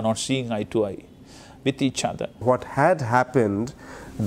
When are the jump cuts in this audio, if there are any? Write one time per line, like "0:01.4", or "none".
0:02.4